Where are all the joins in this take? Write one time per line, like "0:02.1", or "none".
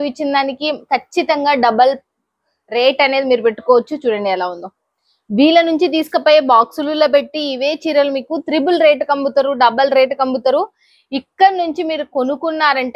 none